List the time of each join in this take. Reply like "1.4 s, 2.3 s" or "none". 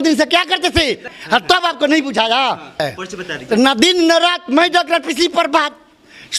1.1 s, 2.8 s